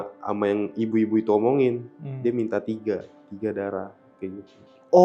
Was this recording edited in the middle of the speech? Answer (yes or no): no